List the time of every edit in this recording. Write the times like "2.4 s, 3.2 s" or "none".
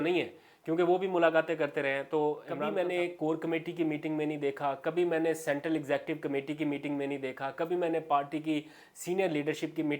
2.5 s

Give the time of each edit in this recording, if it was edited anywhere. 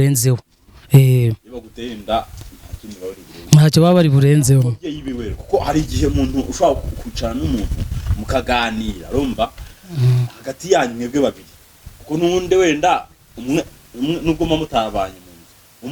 none

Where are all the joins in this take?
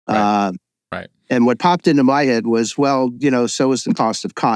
none

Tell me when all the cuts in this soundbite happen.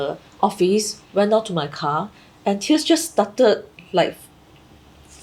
none

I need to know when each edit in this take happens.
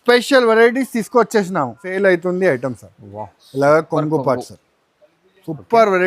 1.8 s

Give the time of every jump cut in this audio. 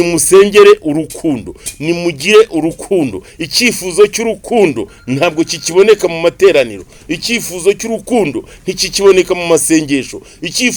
none

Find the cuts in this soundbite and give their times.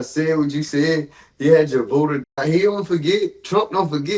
none

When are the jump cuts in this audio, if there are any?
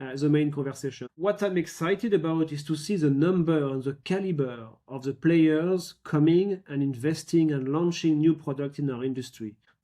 1.1 s

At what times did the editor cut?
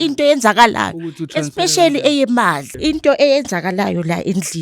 2.7 s

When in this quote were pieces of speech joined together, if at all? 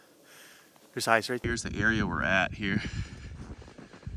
1.4 s

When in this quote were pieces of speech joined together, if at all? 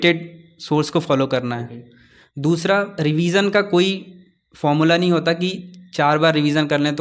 none

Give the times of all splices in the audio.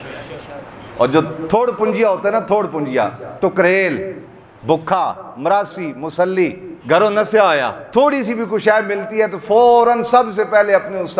6.7 s, 7.8 s

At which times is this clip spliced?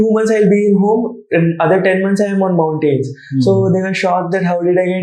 none

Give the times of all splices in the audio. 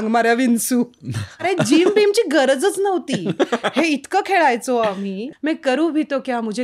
1.4 s, 5.3 s

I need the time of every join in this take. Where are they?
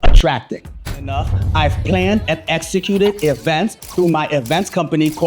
0.9 s

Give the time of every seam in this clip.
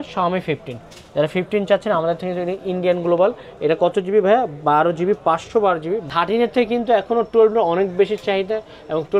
6.1 s

